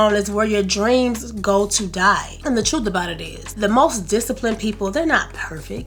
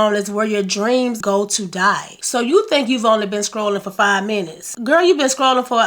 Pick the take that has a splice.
second; 2 cuts; at 1.2 s, 2.1 s

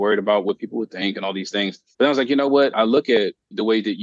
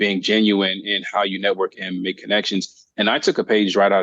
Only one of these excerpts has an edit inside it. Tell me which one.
first; 2 cuts; at 1.8 s, 2.7 s

